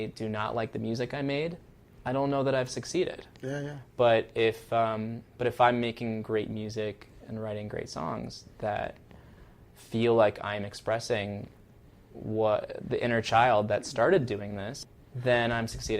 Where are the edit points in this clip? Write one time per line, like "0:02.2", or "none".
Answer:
0:14.9